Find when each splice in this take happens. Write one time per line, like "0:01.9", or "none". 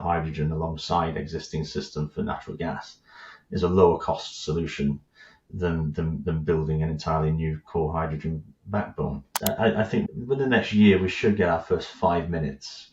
0:09.3